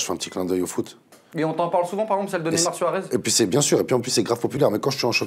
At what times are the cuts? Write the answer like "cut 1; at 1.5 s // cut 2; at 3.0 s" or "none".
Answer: none